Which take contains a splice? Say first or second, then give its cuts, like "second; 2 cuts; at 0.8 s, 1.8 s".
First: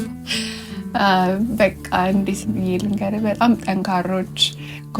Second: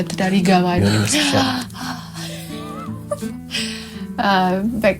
second; 1 cut; at 0.9 s